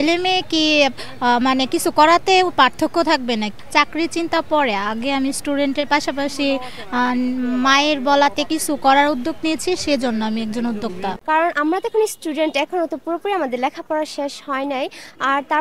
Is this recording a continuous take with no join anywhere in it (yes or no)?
no